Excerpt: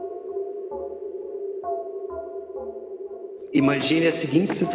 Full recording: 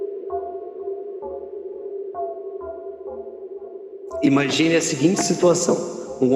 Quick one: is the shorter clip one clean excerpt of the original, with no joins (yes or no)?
no